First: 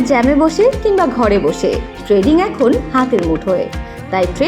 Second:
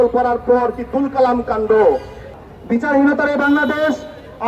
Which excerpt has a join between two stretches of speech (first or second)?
second